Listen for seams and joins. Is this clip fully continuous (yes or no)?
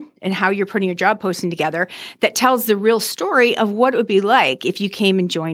yes